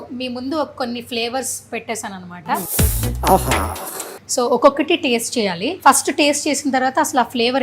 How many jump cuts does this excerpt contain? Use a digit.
3